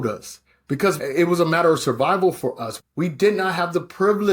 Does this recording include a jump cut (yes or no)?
yes